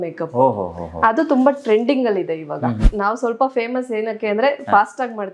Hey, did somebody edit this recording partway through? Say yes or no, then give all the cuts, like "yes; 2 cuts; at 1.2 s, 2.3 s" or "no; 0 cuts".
yes; 1 cut; at 2.8 s